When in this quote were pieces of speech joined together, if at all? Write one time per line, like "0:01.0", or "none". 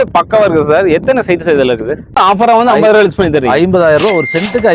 0:02.2

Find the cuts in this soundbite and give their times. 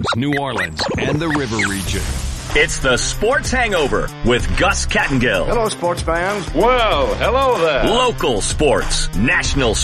0:01.8

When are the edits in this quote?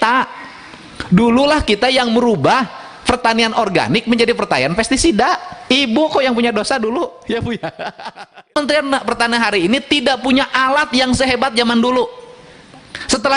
0:08.5

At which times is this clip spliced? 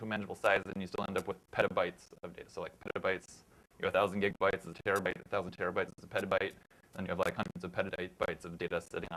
none

